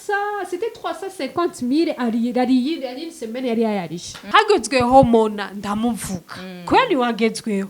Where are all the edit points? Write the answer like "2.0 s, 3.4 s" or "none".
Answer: 4.1 s